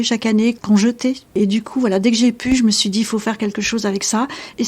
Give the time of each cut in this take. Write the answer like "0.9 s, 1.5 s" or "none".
1.3 s